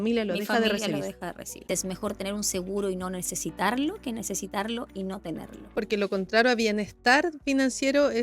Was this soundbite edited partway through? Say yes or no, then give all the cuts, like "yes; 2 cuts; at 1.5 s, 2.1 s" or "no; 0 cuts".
yes; 2 cuts; at 1.7 s, 5.7 s